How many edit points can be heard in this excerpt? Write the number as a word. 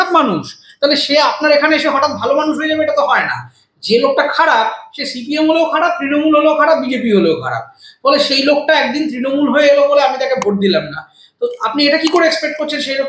zero